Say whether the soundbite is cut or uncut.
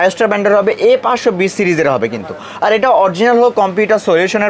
uncut